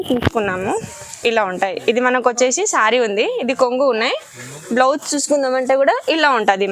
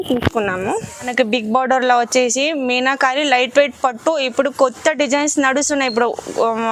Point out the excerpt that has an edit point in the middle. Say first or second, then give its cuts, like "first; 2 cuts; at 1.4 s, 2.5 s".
second; 1 cut; at 1.1 s